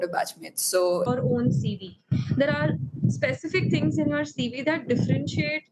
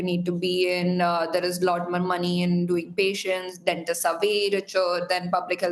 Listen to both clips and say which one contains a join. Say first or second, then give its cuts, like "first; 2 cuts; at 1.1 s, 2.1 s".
first; 1 cut; at 1.1 s